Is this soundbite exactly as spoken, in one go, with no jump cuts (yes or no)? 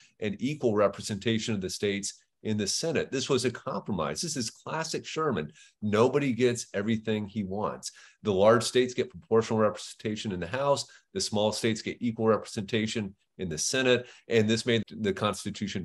no